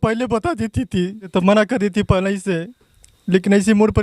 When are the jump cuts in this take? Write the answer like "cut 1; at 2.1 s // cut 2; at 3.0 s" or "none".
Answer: cut 1; at 1.3 s

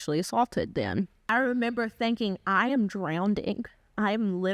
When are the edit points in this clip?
cut 1; at 1.2 s

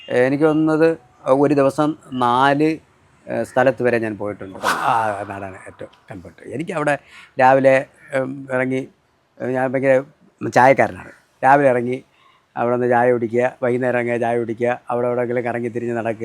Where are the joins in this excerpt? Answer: cut 1; at 4.7 s

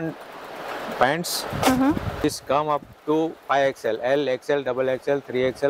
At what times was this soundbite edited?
cut 1; at 2.2 s

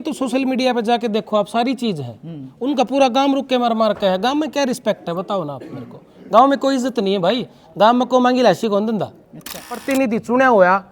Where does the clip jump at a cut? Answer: cut 1; at 9.8 s

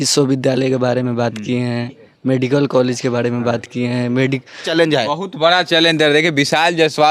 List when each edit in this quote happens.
cut 1; at 4.7 s

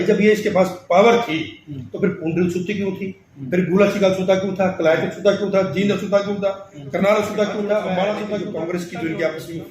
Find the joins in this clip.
cut 1; at 8.5 s

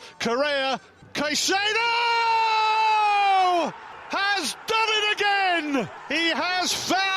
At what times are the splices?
cut 1; at 1.0 s // cut 2; at 3.9 s // cut 3; at 6.0 s

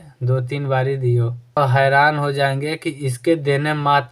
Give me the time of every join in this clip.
cut 1; at 1.6 s

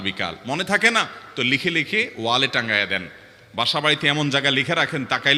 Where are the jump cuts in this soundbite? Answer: none

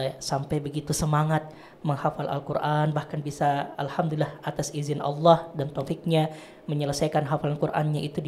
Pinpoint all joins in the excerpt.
none

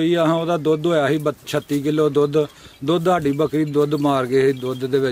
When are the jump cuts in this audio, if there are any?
none

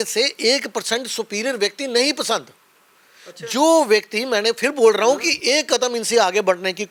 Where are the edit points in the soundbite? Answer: none

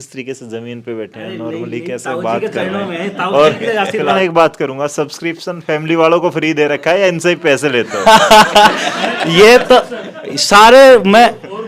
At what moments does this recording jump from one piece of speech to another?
cut 1; at 4.2 s

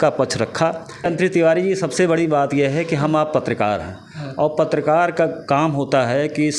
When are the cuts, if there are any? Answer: cut 1; at 1.1 s

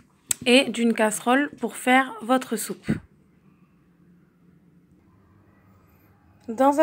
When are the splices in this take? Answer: none

